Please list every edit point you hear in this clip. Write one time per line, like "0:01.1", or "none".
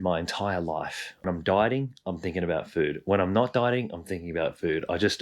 0:01.2